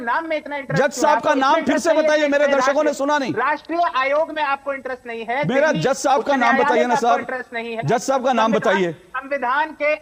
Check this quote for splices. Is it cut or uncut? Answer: uncut